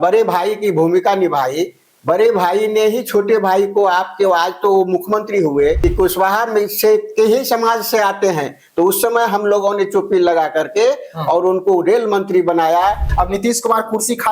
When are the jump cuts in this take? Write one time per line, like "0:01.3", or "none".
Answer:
0:05.8
0:13.1